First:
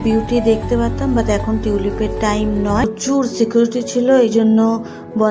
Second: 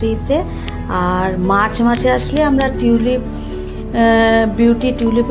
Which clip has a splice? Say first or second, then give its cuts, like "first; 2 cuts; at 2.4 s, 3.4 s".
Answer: first; 1 cut; at 2.8 s